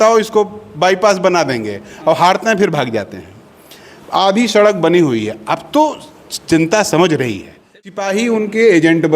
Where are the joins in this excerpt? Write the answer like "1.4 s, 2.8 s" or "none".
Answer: 8.0 s